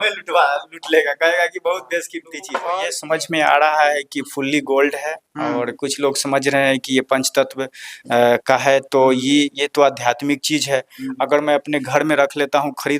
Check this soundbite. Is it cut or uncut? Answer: cut